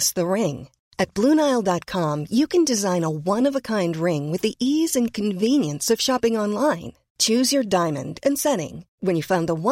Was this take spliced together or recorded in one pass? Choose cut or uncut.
uncut